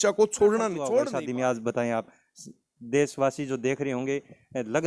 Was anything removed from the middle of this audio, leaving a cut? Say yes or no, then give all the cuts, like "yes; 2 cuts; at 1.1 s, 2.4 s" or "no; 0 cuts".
yes; 1 cut; at 0.9 s